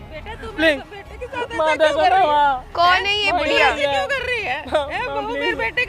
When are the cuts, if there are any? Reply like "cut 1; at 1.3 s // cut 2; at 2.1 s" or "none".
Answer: none